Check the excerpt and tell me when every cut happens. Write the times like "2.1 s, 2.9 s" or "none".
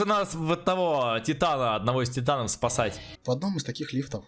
3.1 s